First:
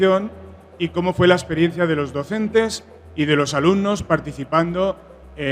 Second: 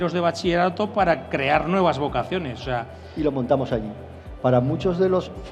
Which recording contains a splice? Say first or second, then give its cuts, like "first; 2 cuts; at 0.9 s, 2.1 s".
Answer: second; 1 cut; at 3.0 s